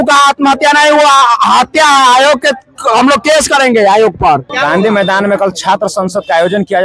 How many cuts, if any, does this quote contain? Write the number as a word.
one